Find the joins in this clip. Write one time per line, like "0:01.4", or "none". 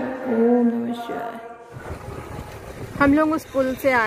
0:01.8